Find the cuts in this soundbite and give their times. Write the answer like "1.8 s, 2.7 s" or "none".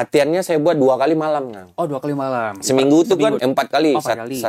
3.4 s